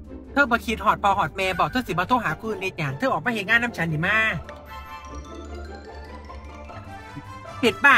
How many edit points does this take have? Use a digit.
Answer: 3